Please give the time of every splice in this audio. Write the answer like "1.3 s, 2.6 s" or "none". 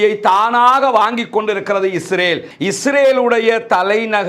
2.5 s